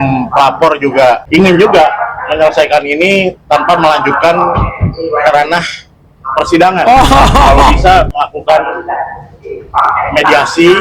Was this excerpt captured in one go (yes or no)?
no